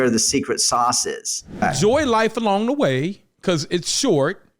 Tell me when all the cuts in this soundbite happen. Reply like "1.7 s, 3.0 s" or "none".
1.6 s

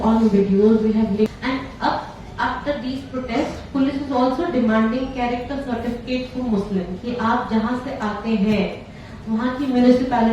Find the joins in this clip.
1.3 s

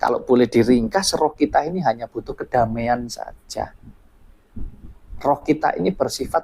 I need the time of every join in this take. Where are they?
none

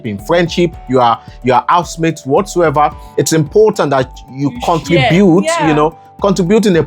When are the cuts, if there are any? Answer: 3.0 s

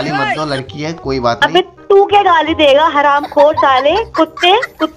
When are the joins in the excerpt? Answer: none

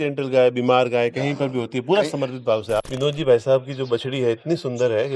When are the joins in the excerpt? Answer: 2.9 s

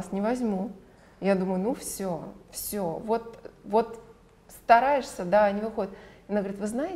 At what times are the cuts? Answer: none

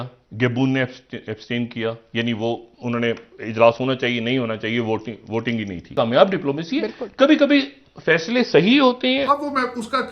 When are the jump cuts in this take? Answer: 5.8 s, 9.3 s

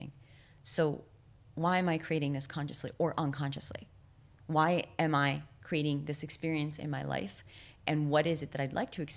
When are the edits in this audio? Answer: none

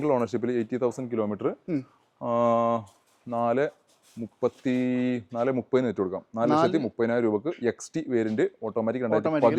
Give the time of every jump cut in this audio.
none

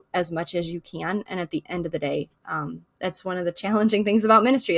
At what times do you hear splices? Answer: none

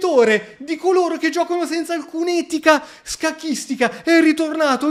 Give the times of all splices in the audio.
none

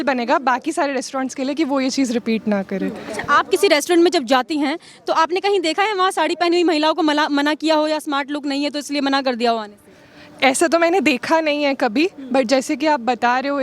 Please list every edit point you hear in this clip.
none

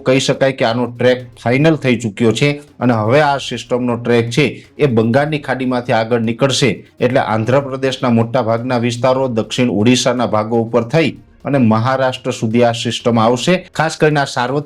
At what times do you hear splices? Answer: 13.7 s

